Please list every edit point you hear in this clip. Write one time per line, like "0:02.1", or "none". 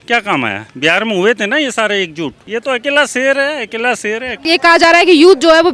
0:02.4
0:04.5